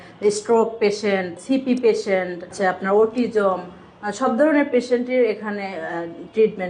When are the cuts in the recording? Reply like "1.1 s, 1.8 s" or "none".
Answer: 1.4 s, 2.5 s